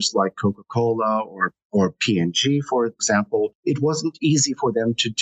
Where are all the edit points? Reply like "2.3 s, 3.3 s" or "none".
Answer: 3.2 s